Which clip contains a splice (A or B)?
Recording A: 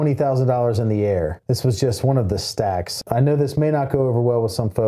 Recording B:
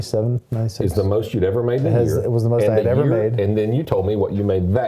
A